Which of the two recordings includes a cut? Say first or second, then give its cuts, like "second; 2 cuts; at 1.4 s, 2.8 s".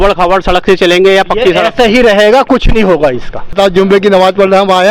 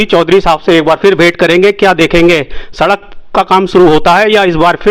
first; 1 cut; at 3.5 s